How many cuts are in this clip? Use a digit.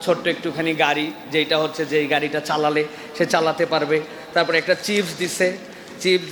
0